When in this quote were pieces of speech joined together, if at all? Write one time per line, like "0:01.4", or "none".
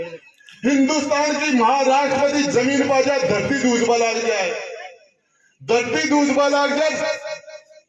none